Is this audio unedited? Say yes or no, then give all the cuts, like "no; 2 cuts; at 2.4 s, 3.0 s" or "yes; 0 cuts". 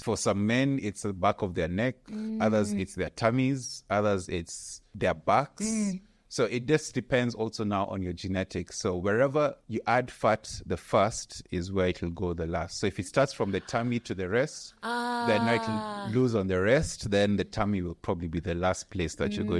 yes; 0 cuts